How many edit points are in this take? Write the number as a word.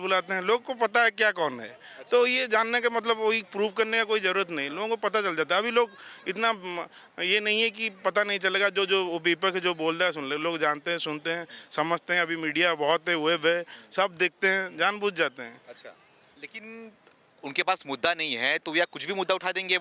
zero